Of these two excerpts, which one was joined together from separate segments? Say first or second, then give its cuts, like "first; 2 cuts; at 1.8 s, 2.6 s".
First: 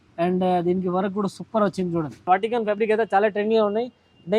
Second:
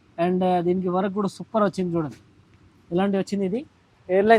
first; 1 cut; at 2.3 s